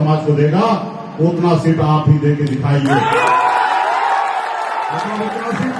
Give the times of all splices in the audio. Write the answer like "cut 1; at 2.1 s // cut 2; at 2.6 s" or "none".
none